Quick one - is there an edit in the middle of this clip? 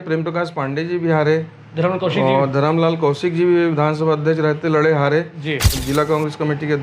yes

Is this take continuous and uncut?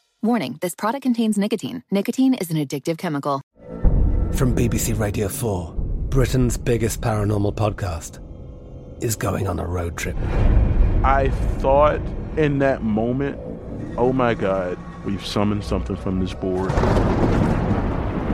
no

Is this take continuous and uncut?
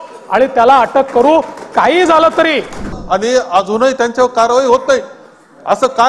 no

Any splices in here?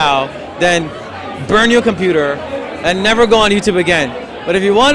no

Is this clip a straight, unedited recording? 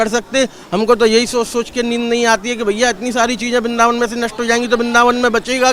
yes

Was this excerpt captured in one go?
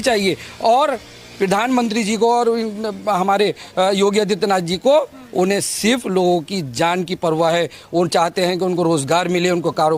yes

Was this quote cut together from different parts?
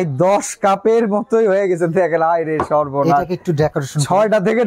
no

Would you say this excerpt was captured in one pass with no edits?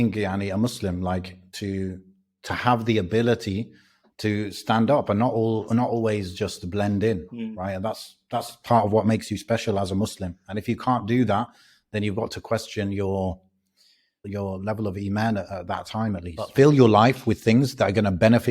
no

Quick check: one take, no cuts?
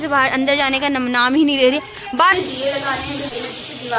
no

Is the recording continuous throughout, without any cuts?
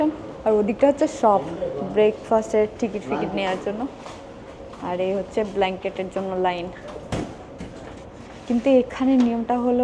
yes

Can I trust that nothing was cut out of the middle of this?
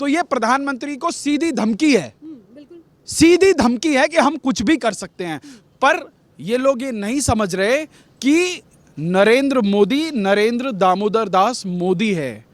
yes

